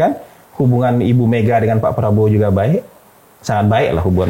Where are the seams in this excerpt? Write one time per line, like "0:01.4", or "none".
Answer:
none